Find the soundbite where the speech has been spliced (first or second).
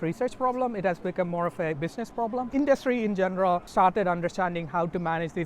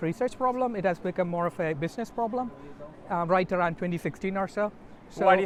first